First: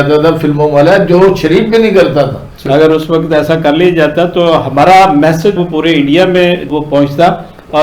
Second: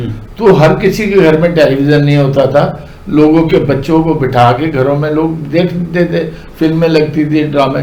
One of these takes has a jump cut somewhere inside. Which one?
first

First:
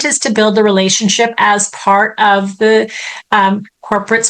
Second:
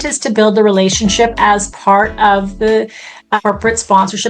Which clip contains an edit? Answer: second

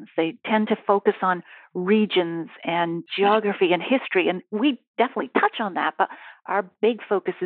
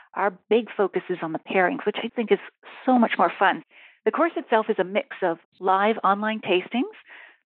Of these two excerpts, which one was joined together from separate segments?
second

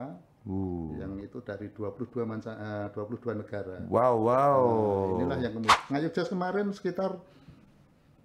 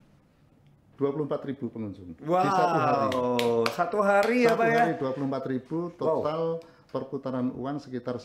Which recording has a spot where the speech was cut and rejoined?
first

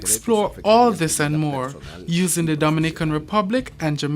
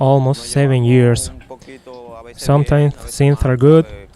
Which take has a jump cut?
first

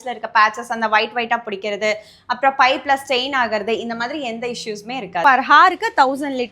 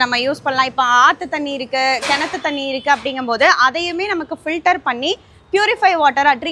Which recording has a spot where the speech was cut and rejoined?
first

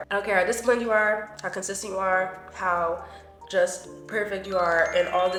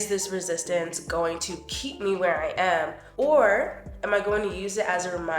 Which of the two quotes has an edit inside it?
second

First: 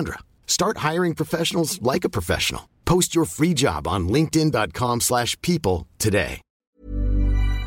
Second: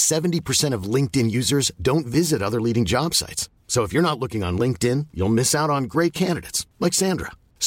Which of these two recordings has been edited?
first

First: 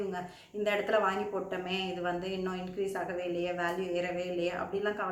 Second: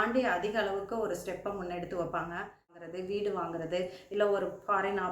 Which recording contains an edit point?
second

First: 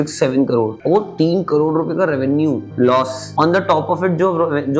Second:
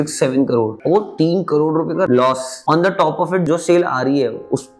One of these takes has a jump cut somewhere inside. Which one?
second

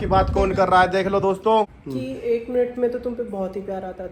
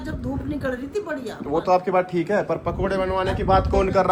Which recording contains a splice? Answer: first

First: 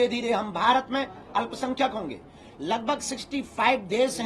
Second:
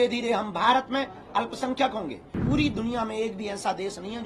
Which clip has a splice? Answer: second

